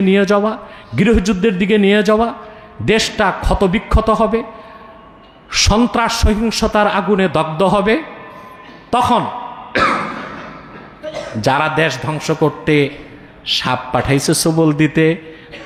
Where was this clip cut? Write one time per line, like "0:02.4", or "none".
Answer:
none